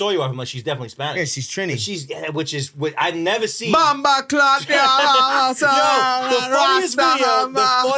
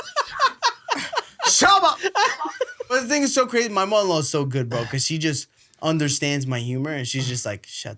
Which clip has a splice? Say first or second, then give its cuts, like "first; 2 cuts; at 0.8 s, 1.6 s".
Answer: second; 1 cut; at 2.9 s